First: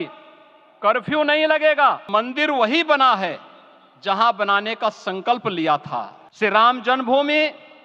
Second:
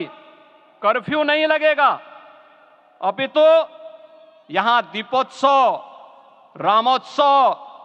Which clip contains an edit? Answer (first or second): first